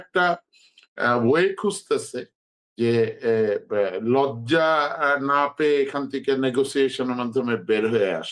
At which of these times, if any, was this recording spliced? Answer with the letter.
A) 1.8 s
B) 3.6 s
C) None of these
C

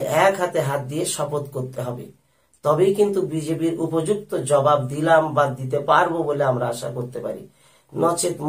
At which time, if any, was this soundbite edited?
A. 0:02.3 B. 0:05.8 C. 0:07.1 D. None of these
D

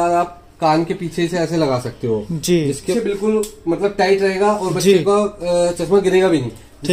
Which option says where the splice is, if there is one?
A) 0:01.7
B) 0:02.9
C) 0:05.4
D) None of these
B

